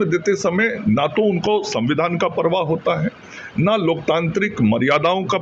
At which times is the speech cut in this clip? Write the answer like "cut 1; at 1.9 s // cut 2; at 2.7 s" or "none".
none